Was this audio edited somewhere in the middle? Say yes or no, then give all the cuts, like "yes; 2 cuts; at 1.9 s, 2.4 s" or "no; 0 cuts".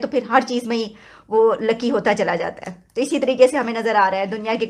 no; 0 cuts